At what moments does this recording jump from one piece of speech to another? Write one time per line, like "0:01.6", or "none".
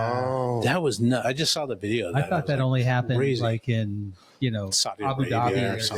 none